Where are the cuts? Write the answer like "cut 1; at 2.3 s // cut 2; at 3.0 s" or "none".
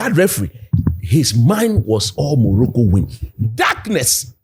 none